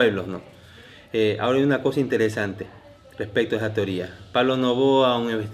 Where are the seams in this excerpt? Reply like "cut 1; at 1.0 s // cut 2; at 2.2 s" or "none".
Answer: cut 1; at 3.6 s